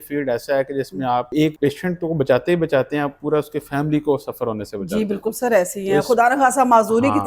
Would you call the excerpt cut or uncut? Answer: cut